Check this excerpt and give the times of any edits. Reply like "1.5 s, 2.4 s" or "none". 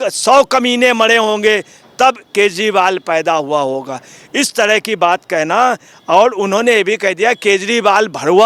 none